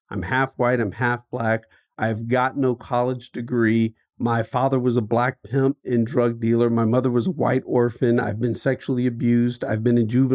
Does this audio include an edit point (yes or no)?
no